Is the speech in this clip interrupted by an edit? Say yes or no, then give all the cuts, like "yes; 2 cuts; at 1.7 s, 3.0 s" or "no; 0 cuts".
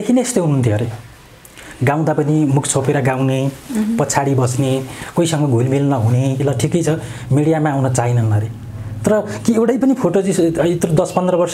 yes; 1 cut; at 6.4 s